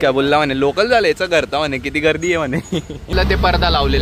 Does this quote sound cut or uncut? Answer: cut